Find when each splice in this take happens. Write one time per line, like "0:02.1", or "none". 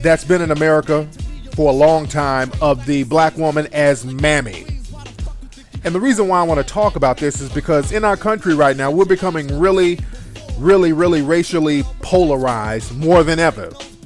none